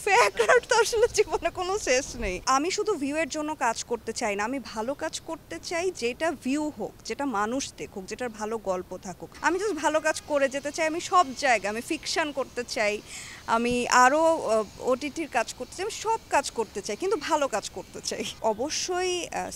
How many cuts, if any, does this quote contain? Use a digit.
3